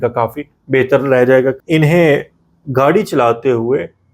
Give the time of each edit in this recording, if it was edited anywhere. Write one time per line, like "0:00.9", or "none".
0:01.6